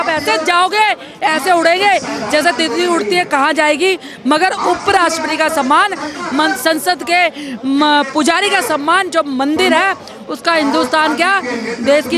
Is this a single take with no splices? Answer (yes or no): yes